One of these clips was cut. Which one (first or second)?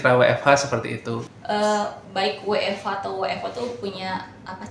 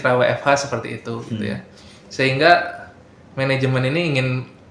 first